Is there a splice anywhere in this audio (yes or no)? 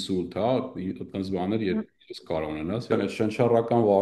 yes